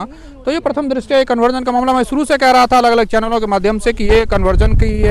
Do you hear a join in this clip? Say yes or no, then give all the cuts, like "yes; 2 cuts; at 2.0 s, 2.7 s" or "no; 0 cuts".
no; 0 cuts